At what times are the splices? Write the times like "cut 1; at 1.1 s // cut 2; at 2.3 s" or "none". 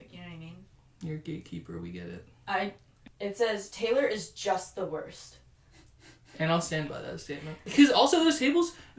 cut 1; at 2.9 s // cut 2; at 7.7 s